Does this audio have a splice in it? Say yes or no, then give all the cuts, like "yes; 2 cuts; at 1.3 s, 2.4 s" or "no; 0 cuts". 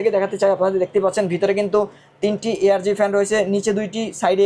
no; 0 cuts